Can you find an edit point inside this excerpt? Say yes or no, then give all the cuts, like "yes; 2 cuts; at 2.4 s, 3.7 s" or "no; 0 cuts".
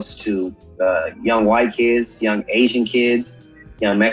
no; 0 cuts